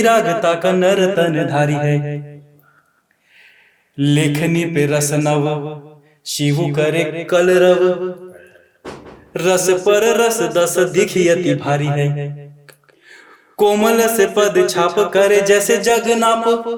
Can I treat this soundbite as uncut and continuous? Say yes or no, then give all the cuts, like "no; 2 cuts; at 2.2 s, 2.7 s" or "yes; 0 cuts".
yes; 0 cuts